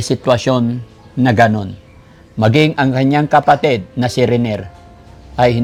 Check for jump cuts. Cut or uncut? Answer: uncut